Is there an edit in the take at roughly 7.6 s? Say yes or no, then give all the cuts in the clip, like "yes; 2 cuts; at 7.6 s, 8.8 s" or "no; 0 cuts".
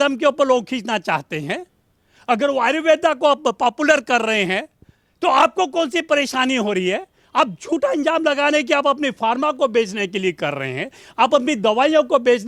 no; 0 cuts